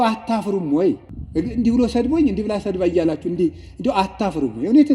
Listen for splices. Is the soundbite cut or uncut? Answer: cut